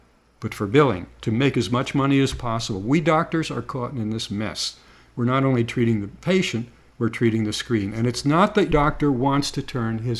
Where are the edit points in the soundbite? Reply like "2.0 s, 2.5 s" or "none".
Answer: 8.7 s